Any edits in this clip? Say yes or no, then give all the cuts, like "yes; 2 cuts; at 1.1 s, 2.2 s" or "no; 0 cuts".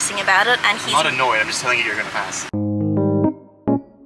yes; 1 cut; at 2.4 s